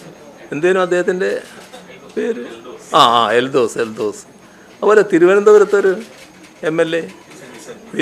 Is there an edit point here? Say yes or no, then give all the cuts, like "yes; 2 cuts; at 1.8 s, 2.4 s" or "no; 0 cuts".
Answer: no; 0 cuts